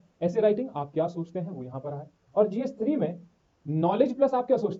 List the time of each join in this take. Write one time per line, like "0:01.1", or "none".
none